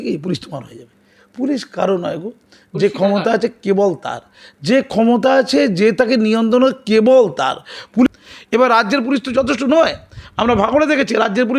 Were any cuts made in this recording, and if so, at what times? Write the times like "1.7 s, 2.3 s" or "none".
8.1 s